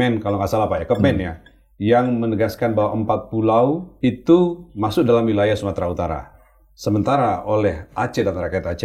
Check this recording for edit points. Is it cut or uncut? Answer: cut